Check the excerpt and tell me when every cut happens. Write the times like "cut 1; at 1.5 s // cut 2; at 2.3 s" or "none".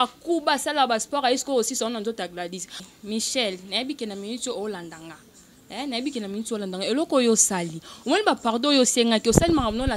cut 1; at 2.8 s